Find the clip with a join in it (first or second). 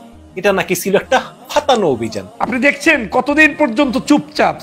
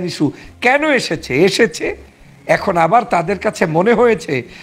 first